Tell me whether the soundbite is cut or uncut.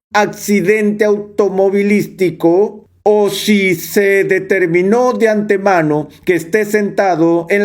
cut